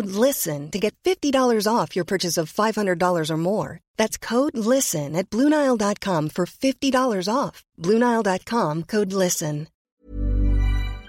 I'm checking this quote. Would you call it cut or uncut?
cut